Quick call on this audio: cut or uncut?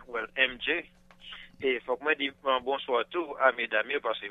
uncut